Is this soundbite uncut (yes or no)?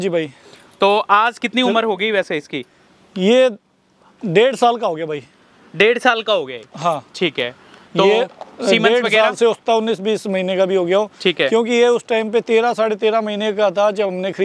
yes